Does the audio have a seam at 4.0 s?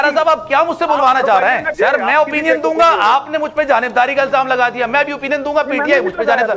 no; 1 cut; at 1.7 s

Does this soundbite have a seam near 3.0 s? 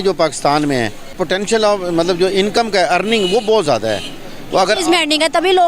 no; 1 cut; at 1.1 s

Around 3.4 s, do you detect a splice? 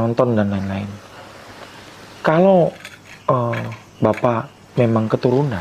no; 0 cuts

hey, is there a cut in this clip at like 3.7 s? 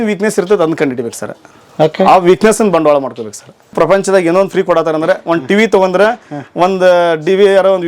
yes; 1 cut; at 3.7 s

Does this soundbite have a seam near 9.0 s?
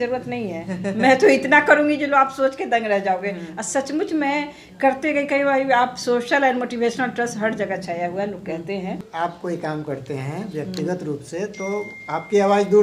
yes; 1 cut; at 9.0 s

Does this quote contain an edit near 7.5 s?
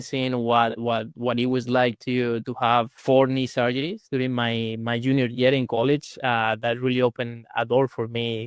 no; 1 cut; at 2.9 s

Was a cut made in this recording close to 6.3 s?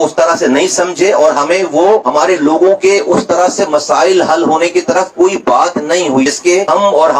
yes; 1 cut; at 6.3 s

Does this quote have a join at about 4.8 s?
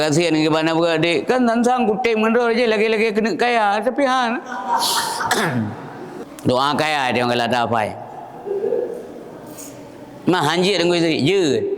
no; 1 cut; at 6.2 s

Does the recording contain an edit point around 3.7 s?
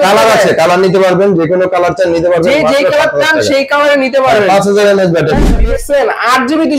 no; 1 cut; at 5.5 s

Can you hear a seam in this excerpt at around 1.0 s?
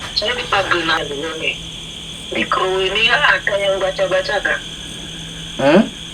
yes; 1 cut; at 1.0 s

